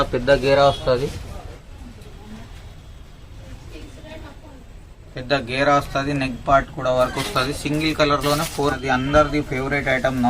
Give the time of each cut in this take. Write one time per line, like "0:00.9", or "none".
0:08.8